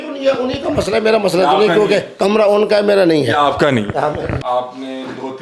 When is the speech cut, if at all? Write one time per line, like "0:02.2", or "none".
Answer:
0:04.3